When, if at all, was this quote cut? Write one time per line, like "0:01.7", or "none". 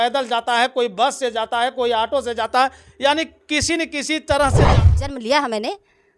0:04.6

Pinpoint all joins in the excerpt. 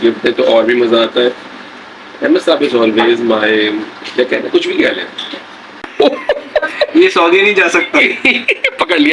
0:05.8

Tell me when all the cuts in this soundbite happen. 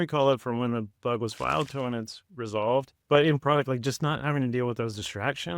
0:03.0

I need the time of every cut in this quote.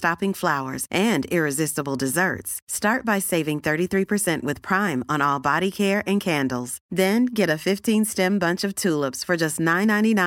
none

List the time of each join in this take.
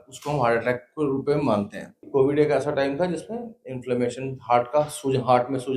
0:02.0

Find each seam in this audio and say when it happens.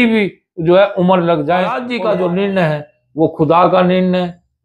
0:01.8

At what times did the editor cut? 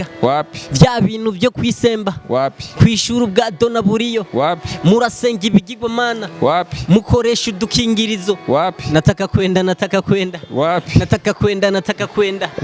none

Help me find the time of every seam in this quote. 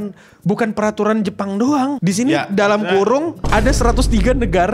0:02.0
0:03.4

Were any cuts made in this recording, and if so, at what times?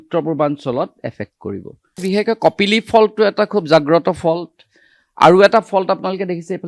0:02.0

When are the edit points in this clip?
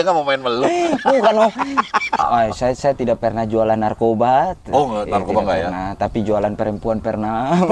0:02.2

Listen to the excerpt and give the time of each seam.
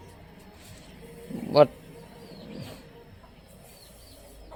none

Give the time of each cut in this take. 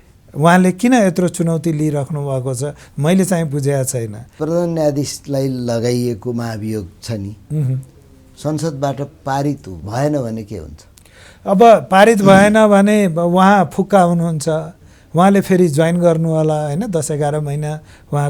0:04.3
0:09.7

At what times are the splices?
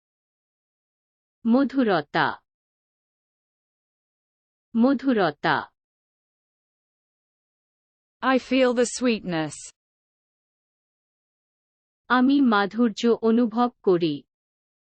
none

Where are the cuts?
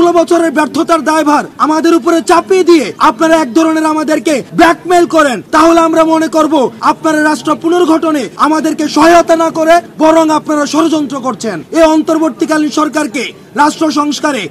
0:01.5
0:02.9
0:04.5
0:05.4
0:06.8
0:08.3
0:09.9
0:11.6

